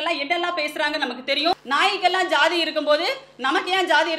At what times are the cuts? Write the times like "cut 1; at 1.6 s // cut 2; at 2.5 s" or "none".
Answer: cut 1; at 1.6 s